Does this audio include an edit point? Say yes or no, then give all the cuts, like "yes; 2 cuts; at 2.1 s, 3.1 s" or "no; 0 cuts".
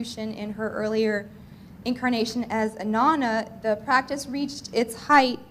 no; 0 cuts